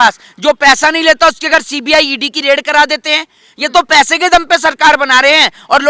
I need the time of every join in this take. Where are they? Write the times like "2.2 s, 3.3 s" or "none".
none